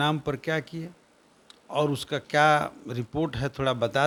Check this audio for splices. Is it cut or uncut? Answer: uncut